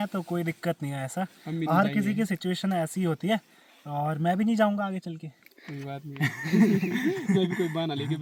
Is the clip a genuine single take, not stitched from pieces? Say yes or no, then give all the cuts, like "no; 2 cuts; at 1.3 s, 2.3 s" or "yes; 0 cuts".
yes; 0 cuts